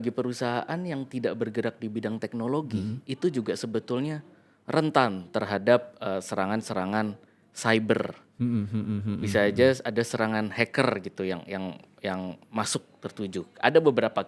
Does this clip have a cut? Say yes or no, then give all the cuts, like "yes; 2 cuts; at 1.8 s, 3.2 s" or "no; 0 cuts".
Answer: no; 0 cuts